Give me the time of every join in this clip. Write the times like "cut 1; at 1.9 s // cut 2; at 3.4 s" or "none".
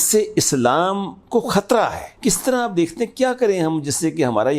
cut 1; at 2.1 s